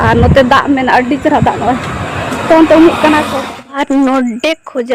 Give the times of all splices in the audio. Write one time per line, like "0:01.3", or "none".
0:03.5